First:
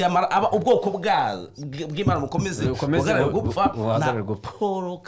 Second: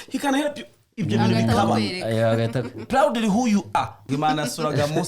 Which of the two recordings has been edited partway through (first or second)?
second